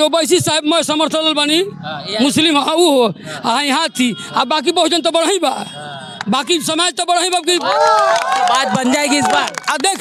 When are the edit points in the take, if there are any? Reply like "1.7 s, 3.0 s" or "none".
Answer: none